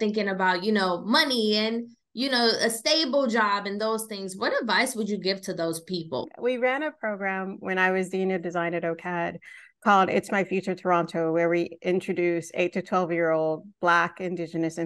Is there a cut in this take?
yes; 1 cut; at 6.3 s

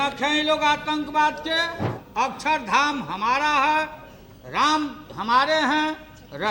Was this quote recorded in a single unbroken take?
no; 1 cut; at 2.0 s

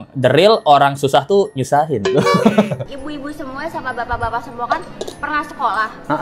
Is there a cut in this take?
yes; 1 cut; at 2.9 s

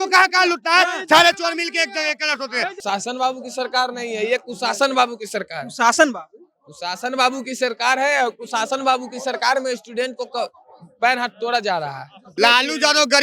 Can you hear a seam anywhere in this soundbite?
yes; 2 cuts; at 2.8 s, 12.2 s

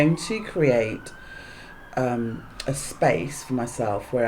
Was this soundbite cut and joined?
no; 0 cuts

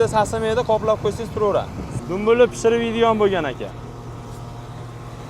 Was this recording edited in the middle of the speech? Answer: yes; 1 cut; at 1.9 s

